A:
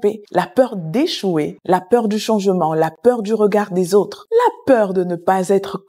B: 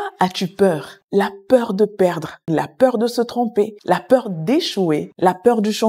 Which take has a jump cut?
B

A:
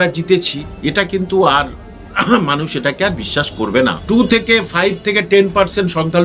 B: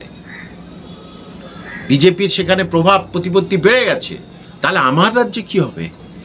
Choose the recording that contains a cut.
A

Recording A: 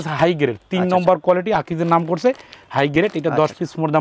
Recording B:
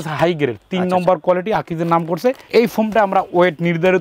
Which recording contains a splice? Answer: B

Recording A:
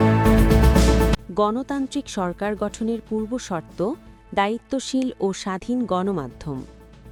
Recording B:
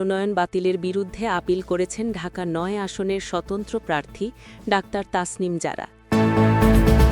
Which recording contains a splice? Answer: B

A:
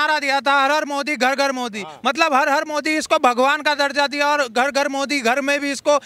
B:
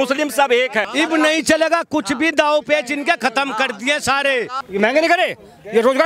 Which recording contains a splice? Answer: B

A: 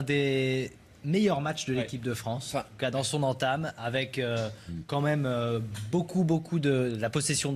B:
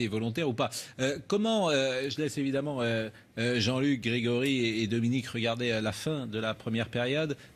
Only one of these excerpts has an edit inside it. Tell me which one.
A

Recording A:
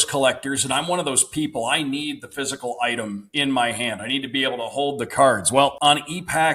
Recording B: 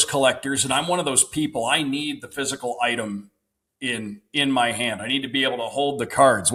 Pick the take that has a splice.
A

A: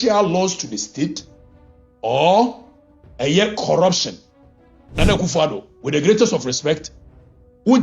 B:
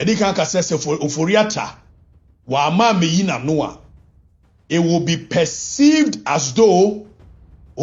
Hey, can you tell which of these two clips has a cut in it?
A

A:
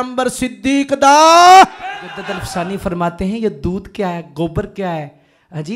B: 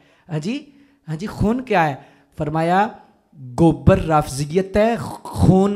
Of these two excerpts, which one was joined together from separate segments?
A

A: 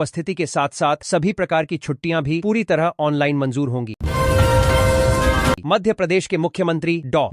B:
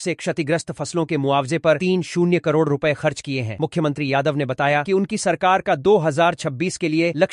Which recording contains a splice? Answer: A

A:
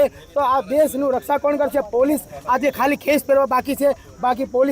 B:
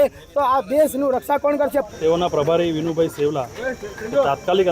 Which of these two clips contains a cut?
B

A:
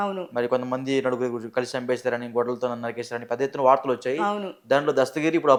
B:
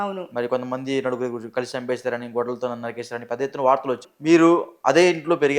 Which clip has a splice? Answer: B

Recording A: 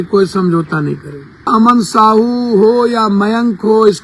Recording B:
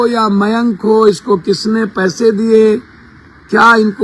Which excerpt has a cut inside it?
A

